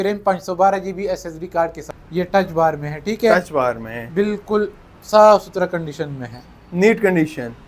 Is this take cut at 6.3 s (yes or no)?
no